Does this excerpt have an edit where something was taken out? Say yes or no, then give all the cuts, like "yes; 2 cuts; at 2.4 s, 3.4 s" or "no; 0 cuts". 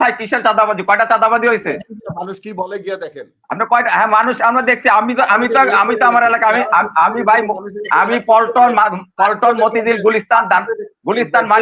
no; 0 cuts